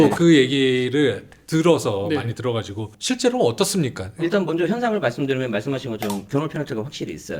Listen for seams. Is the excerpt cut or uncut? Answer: uncut